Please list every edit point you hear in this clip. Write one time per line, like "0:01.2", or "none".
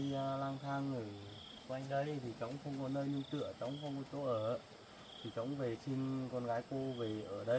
none